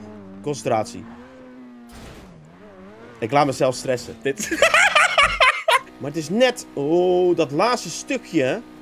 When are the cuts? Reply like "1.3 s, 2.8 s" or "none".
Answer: 5.8 s